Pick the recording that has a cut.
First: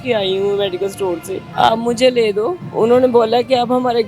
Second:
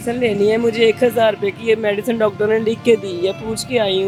first; 2 cuts; at 1.4 s, 2.7 s

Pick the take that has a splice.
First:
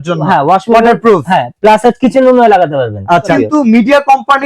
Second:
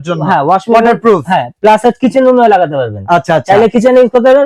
first; 1 cut; at 3.3 s

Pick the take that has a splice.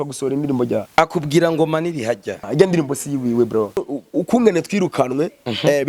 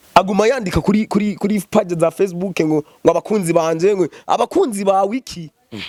first; 3 cuts; at 0.9 s, 2.4 s, 3.8 s

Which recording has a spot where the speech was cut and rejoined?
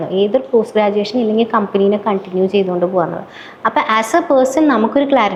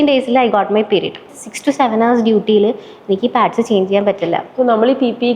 second; 1 cut; at 1.3 s

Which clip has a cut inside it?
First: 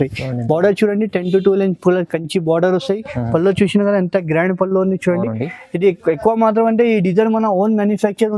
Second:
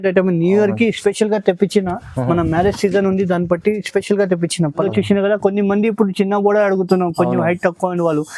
second; 1 cut; at 4.8 s

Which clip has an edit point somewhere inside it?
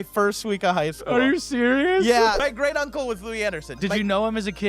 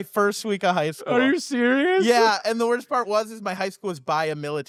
first; 2 cuts; at 2.4 s, 3.7 s

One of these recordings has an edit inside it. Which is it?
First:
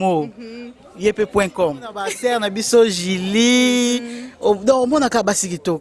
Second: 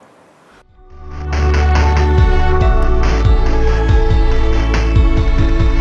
first; 1 cut; at 2.1 s

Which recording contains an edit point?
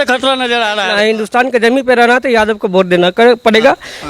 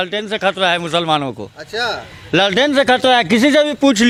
first; 1 cut; at 0.9 s

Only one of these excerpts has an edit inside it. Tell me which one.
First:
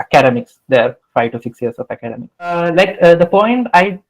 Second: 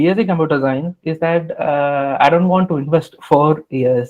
first; 1 cut; at 2.5 s

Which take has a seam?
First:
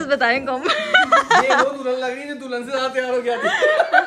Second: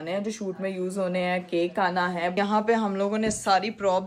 second; 1 cut; at 2.4 s

